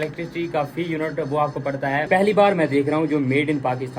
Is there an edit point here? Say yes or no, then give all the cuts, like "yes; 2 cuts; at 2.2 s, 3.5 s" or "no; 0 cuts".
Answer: yes; 1 cut; at 2.1 s